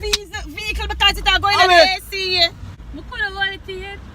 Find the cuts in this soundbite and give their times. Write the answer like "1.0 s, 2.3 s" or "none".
2.7 s